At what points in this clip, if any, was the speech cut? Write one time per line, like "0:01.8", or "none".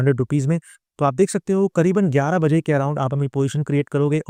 none